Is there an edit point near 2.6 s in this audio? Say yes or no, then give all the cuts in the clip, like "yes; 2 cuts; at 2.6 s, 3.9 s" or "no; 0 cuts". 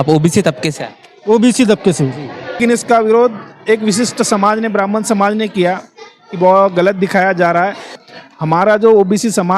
yes; 2 cuts; at 2.6 s, 8.0 s